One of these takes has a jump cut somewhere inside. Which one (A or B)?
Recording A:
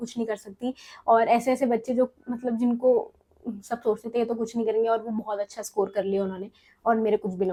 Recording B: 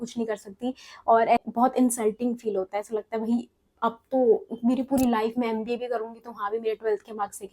B